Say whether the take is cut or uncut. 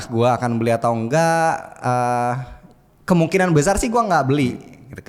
uncut